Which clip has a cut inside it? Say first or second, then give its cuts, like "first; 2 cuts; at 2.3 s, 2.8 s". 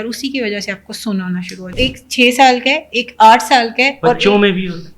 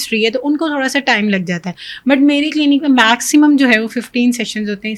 first; 1 cut; at 1.7 s